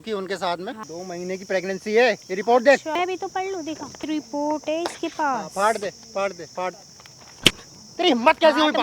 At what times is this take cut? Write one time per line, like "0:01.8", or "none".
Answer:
0:00.8
0:03.0
0:04.1